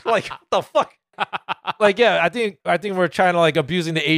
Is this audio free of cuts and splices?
no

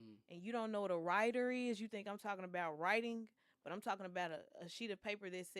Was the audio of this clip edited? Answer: no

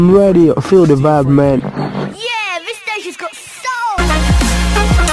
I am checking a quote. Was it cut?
no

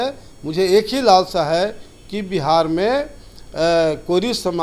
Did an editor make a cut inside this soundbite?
no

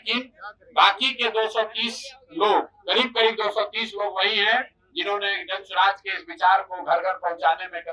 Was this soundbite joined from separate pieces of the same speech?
no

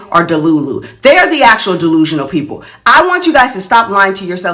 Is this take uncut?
yes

